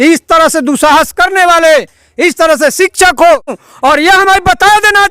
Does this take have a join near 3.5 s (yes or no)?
yes